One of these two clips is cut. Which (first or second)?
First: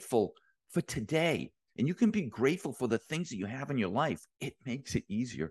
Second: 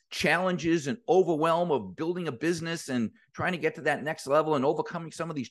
first